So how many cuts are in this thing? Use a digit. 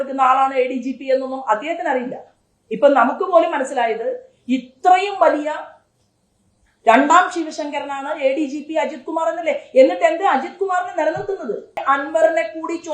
1